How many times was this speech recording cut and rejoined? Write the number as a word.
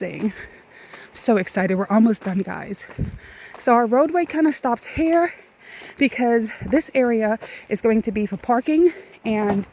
zero